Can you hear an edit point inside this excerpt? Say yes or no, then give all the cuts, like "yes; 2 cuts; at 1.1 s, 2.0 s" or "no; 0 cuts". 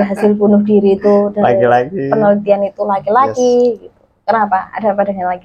no; 0 cuts